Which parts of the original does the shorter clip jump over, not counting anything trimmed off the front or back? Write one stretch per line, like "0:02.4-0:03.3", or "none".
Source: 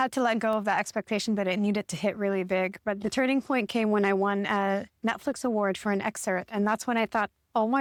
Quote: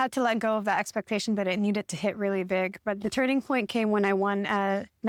none